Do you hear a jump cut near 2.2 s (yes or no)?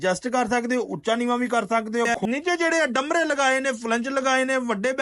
yes